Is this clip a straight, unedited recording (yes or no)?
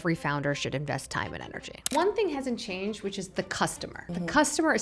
no